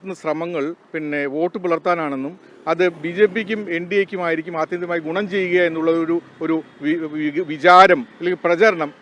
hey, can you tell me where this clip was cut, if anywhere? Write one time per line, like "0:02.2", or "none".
none